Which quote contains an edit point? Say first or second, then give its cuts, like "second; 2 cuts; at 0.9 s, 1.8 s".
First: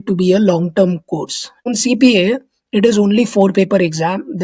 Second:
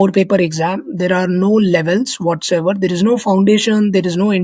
first; 1 cut; at 1.7 s